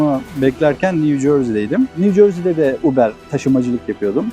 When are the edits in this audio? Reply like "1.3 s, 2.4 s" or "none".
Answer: 1.9 s, 3.3 s